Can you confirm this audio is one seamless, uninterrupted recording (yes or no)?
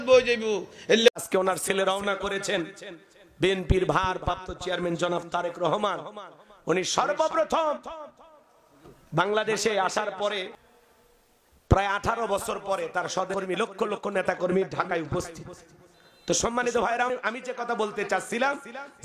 no